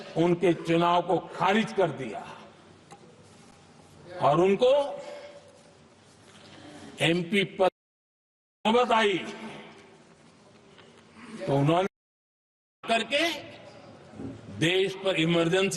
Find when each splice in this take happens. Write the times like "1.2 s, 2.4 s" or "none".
none